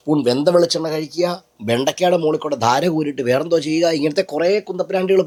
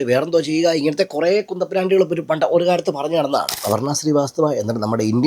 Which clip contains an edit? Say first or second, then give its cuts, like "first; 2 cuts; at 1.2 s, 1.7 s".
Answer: second; 1 cut; at 3.5 s